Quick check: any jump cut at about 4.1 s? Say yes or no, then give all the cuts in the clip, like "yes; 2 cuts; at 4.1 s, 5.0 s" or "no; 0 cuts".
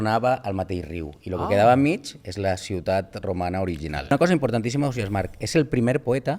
yes; 1 cut; at 4.1 s